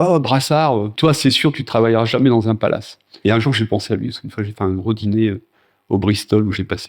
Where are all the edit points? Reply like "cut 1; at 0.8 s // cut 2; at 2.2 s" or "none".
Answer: cut 1; at 0.9 s // cut 2; at 3.2 s